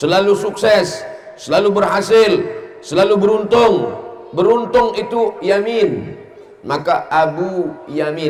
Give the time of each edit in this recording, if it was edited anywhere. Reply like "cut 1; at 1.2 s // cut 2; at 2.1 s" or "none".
none